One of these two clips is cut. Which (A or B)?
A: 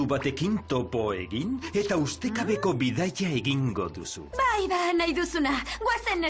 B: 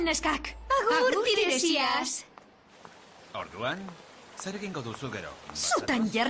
A